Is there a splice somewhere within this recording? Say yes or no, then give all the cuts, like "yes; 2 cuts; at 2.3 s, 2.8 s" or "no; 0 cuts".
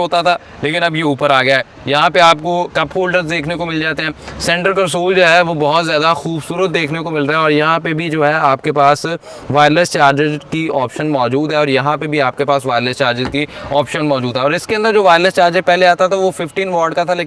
no; 0 cuts